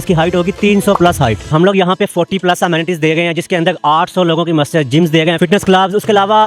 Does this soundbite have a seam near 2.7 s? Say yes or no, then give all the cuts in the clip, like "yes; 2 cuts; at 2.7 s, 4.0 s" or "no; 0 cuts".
no; 2 cuts; at 1.5 s, 5.4 s